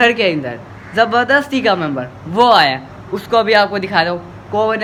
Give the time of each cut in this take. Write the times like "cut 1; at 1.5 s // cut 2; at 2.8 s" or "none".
none